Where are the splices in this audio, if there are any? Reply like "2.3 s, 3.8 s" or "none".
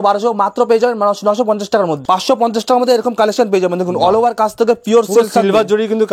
2.0 s